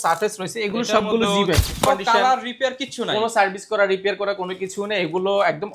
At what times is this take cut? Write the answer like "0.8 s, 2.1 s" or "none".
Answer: 1.9 s